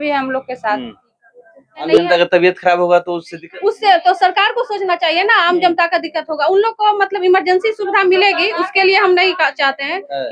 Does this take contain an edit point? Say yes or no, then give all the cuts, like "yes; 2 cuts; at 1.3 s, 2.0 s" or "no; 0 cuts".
yes; 1 cut; at 1.7 s